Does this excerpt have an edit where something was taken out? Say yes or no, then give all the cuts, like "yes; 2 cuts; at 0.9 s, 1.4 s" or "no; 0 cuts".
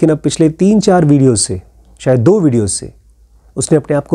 no; 0 cuts